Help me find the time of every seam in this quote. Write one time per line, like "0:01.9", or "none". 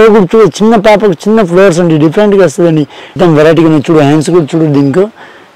0:03.1